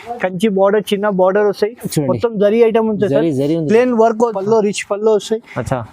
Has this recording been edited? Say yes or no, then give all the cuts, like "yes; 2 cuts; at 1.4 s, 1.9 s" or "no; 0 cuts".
yes; 1 cut; at 4.4 s